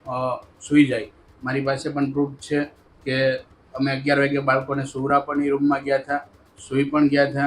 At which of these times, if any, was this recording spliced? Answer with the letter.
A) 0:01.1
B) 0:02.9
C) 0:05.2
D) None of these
D